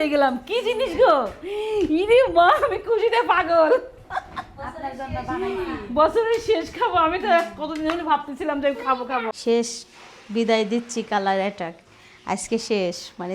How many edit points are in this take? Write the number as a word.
one